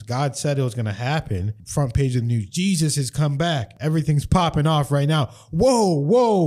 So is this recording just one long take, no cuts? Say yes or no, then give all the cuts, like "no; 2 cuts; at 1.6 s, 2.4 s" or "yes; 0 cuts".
no; 2 cuts; at 1.6 s, 3.7 s